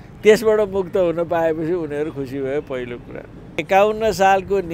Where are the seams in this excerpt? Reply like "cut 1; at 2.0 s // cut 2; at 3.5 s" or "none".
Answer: cut 1; at 3.6 s